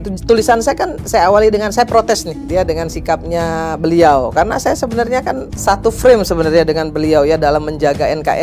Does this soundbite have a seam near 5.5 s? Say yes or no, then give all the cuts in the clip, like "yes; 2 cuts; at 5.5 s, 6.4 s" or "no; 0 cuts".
yes; 2 cuts; at 2.3 s, 5.5 s